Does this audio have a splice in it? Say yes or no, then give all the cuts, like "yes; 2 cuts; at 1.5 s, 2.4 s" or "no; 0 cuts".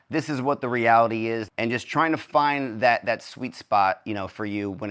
yes; 1 cut; at 1.5 s